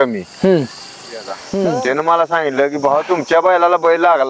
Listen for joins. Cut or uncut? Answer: cut